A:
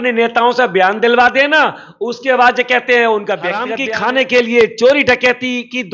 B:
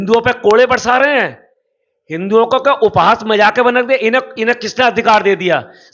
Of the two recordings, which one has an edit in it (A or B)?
A